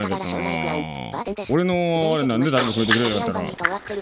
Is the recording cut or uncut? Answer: uncut